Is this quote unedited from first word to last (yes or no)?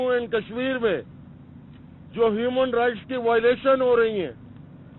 yes